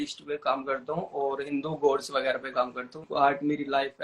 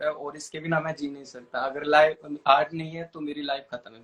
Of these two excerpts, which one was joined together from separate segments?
first; 1 cut; at 3.1 s

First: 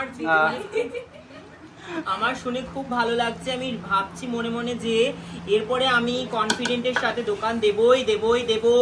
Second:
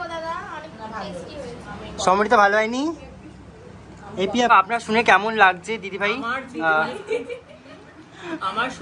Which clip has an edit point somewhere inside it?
second; 1 cut; at 4.5 s

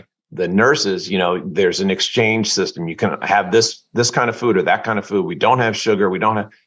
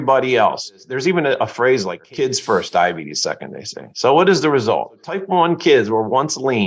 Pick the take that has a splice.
second; 3 cuts; at 0.8 s, 2.0 s, 5.2 s

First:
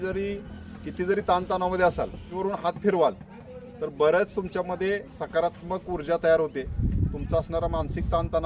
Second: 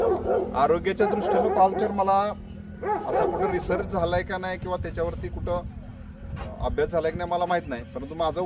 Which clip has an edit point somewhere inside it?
first; 1 cut; at 2.3 s

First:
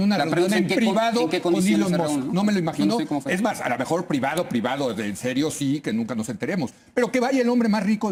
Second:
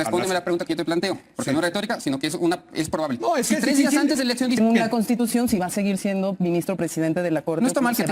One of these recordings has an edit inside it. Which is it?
second; 1 cut; at 4.6 s

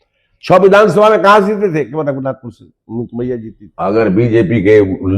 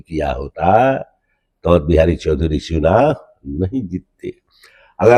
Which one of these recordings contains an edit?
first; 1 cut; at 3.6 s

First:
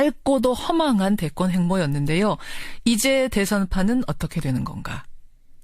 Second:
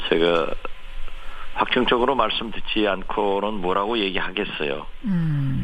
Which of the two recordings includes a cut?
first; 1 cut; at 2.1 s

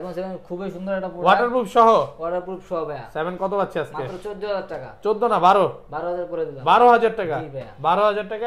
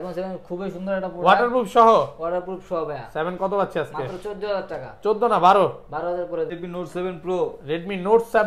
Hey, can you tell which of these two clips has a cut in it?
second; 1 cut; at 6.6 s

